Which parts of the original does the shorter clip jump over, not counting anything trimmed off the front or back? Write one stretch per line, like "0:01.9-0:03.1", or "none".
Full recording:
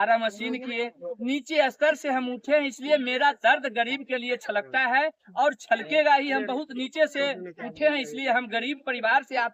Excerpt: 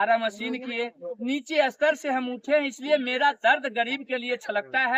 none